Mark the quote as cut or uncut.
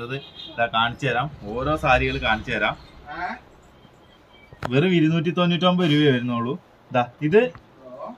uncut